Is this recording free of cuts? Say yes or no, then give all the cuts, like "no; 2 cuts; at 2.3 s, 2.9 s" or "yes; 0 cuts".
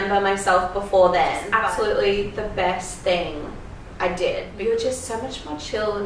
no; 2 cuts; at 1.4 s, 4.5 s